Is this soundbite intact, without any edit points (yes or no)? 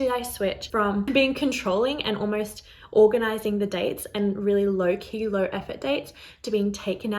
no